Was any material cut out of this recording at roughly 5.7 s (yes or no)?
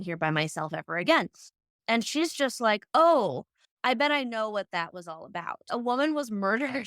yes